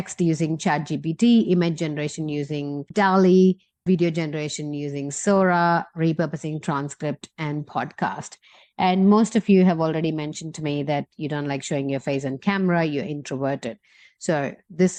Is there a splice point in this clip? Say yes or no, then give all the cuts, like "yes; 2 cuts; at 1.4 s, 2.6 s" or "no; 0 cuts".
no; 0 cuts